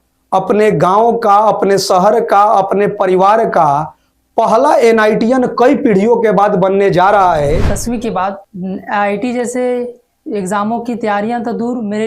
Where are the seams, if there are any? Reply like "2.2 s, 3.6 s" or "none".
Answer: 7.7 s